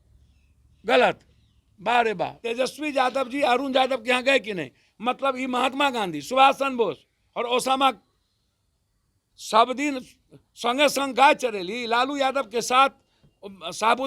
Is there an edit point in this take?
yes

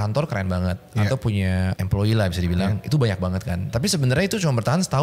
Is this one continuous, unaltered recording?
no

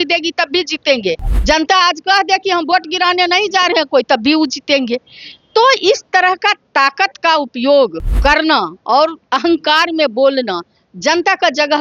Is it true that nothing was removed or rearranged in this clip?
no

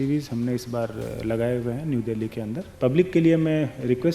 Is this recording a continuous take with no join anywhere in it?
no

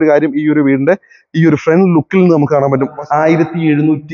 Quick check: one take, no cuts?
no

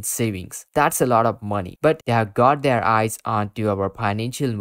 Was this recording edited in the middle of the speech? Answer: yes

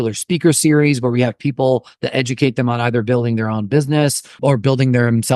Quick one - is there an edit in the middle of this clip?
yes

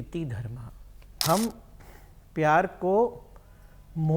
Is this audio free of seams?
no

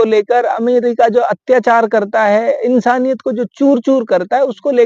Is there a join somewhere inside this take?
no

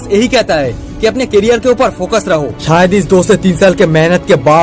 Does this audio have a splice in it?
yes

